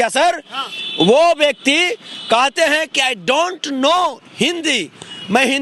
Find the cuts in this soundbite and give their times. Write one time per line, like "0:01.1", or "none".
none